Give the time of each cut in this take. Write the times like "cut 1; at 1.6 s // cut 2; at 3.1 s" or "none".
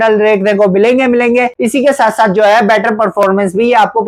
cut 1; at 1.6 s